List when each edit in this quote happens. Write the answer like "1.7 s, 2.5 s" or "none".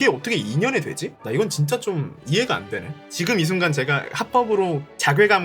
3.0 s